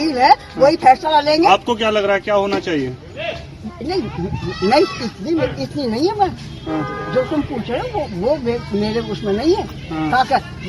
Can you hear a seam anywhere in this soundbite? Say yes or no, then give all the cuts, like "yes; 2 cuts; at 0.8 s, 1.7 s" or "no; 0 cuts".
no; 0 cuts